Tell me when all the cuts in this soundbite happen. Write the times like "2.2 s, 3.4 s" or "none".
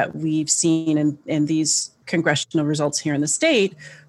none